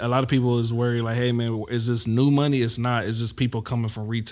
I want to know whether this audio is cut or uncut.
uncut